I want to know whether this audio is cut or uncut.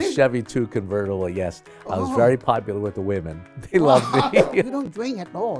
cut